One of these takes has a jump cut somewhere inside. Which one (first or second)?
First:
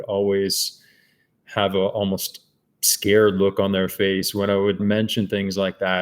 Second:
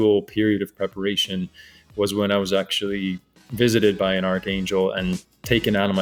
first